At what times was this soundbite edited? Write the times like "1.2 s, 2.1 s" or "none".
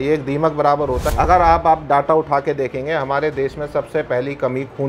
1.1 s